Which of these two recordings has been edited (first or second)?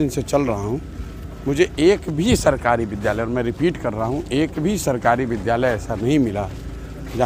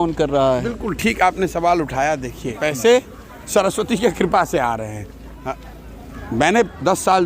second